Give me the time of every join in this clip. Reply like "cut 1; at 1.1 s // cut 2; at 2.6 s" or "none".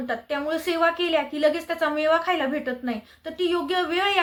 none

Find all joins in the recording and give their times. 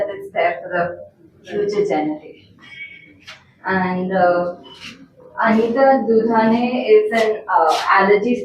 none

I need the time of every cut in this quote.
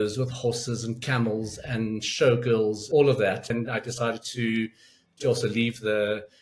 cut 1; at 2.8 s // cut 2; at 3.4 s

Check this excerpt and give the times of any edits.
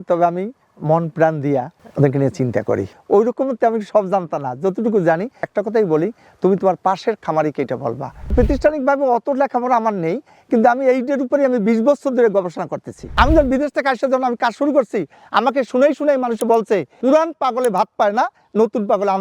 cut 1; at 2.9 s // cut 2; at 8.1 s // cut 3; at 13.0 s

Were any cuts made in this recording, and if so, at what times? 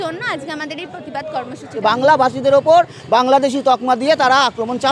cut 1; at 1.8 s

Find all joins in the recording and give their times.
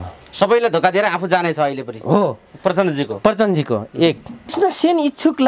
cut 1; at 4.5 s

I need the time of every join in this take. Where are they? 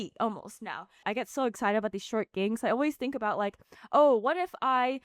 cut 1; at 1.0 s

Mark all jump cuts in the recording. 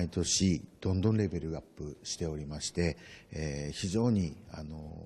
cut 1; at 3.3 s

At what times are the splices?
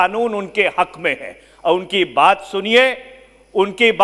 none

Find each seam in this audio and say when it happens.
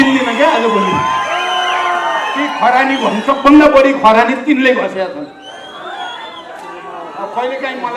none

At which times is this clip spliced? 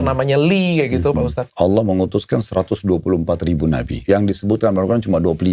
cut 1; at 1.4 s // cut 2; at 3.9 s

